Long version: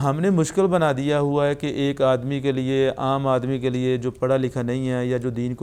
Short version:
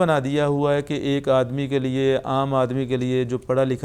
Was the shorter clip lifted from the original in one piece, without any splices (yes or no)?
yes